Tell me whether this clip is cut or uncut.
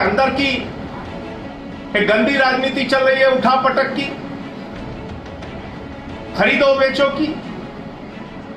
uncut